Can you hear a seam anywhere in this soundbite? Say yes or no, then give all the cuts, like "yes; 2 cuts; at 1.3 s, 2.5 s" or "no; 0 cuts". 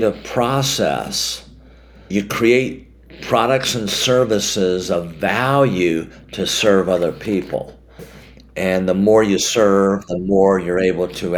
yes; 1 cut; at 2.1 s